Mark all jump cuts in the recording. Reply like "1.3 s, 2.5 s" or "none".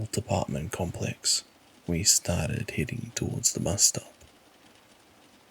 4.2 s

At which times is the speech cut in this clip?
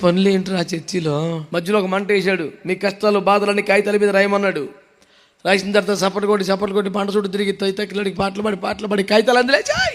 1.4 s

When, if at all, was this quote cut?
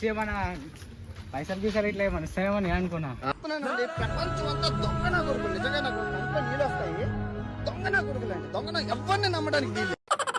3.3 s

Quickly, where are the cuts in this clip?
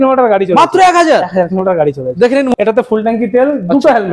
2.5 s

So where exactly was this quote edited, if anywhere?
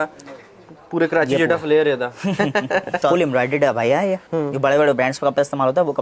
3.0 s, 4.2 s

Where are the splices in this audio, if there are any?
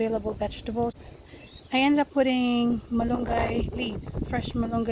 0.9 s

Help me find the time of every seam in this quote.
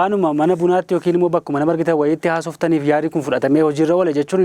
none

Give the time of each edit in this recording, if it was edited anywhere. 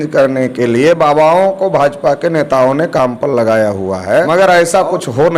4.3 s

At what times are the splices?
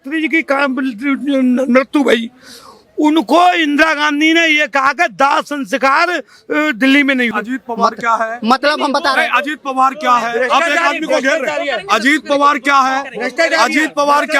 7.3 s

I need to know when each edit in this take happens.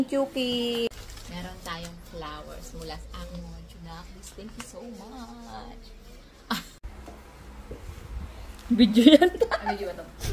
1.0 s, 6.9 s

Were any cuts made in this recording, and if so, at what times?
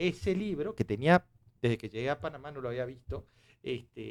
none

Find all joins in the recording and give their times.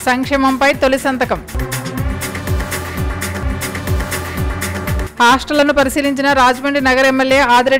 none

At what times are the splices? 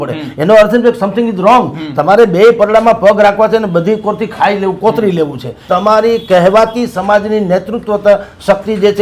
5.6 s

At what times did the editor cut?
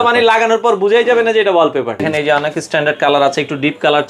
2.1 s

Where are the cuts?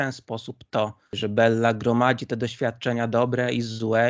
1.1 s

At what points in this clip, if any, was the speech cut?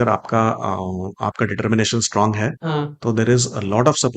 2.6 s

